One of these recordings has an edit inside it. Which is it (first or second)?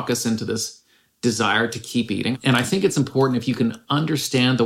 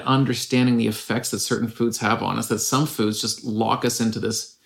first